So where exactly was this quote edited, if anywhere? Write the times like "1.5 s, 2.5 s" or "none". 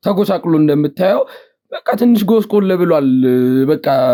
none